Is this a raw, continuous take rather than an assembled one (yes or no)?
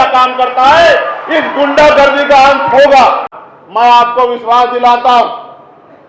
no